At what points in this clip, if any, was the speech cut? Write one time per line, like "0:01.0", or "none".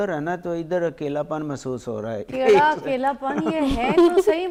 none